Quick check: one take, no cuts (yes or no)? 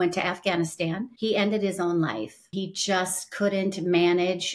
no